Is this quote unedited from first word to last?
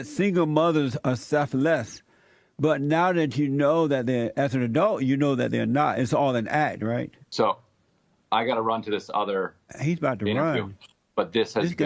no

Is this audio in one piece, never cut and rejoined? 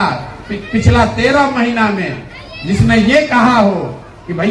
yes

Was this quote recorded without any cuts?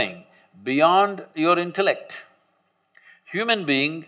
yes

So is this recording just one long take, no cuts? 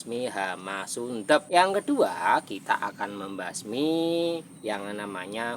no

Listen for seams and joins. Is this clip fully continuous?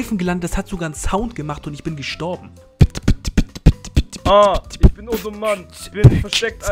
no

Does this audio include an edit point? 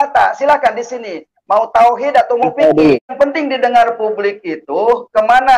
yes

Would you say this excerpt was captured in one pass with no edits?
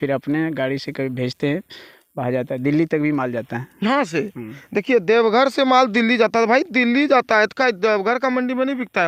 yes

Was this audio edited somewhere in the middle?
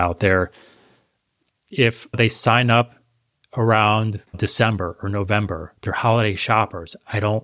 yes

